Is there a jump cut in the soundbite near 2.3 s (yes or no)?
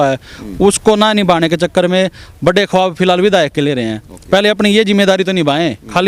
no